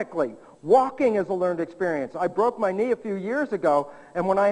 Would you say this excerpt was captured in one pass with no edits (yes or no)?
yes